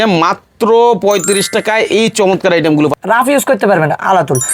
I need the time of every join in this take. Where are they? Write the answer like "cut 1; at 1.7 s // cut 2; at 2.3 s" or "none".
cut 1; at 3.0 s